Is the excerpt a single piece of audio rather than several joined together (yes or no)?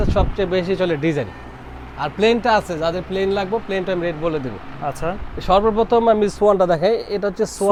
yes